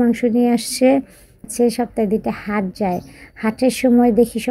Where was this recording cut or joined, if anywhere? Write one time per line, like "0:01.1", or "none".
0:01.5